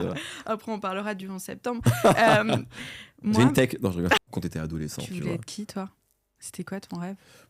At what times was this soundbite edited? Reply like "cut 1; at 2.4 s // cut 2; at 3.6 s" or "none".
cut 1; at 4.2 s